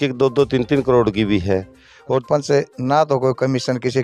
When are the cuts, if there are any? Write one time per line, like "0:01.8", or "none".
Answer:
0:02.2

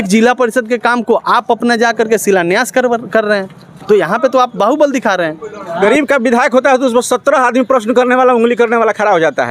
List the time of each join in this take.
0:05.7

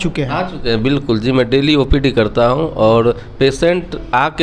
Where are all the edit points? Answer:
none

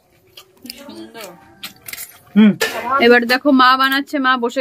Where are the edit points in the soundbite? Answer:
0:02.7

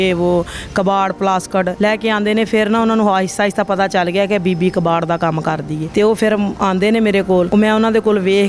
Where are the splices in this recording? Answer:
0:01.7
0:05.8
0:07.5

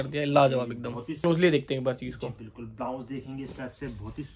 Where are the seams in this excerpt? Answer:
0:01.1

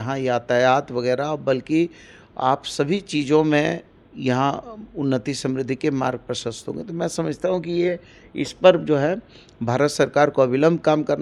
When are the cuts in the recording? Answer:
none

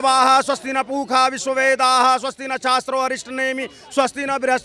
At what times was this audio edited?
none

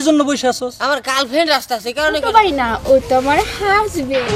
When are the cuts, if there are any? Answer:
0:02.2

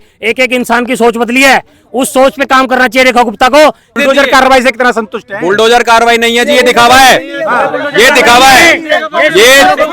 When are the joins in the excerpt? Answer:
0:03.9

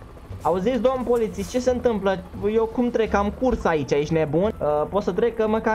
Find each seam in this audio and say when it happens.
0:04.5

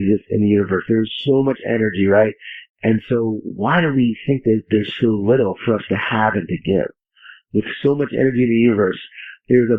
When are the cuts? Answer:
none

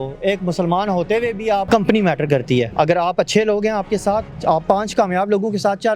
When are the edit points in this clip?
0:01.7
0:02.7
0:04.3

